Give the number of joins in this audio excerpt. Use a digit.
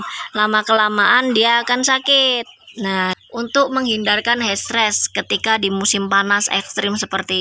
1